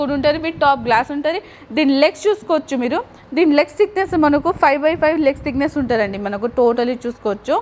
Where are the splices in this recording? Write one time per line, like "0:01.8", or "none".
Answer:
none